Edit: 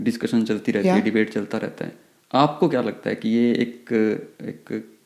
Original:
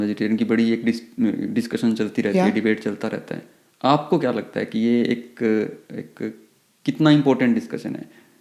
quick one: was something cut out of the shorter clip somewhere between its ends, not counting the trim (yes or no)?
no